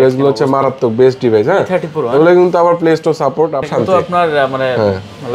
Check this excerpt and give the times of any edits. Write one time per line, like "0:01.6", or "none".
0:03.7